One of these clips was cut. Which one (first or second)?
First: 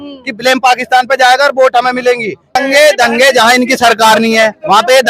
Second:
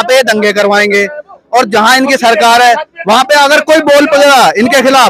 first